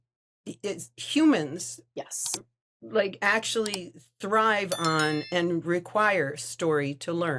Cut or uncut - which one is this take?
uncut